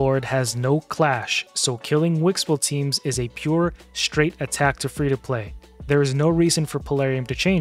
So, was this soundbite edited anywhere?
no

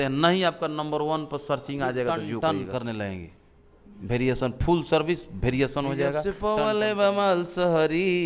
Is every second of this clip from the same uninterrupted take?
no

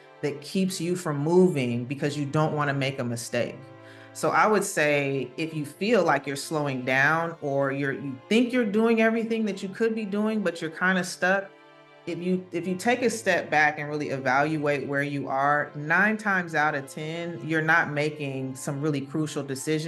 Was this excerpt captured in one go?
yes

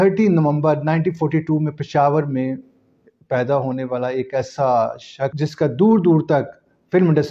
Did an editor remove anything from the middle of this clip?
no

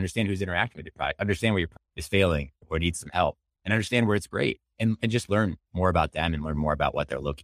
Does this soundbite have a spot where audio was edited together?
no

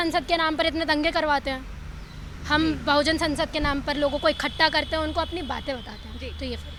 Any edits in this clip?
no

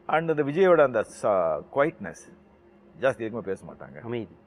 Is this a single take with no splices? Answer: yes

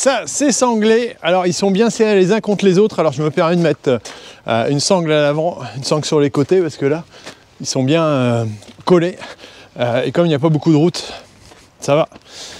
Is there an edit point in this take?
no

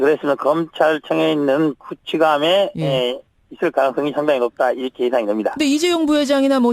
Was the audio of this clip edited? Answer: no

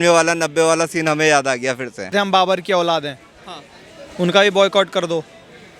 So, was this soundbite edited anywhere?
yes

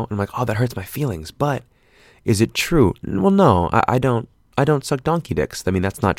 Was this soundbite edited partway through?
no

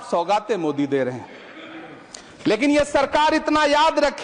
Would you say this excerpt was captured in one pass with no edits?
yes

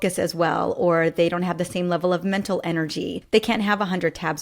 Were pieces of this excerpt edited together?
yes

